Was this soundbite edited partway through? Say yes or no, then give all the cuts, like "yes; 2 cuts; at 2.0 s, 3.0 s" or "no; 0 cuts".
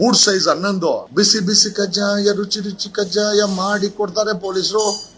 yes; 1 cut; at 1.1 s